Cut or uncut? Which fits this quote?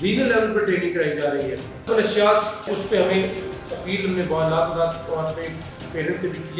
cut